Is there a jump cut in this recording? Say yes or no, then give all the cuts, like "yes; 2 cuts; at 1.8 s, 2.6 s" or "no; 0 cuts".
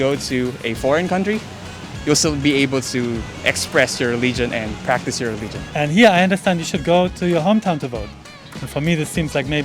yes; 1 cut; at 5.7 s